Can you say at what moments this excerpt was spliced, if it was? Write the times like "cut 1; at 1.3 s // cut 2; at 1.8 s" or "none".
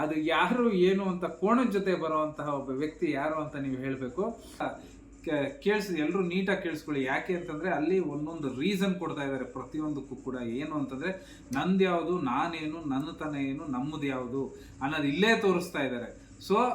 cut 1; at 4.6 s